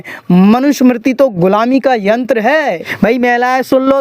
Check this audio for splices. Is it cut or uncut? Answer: cut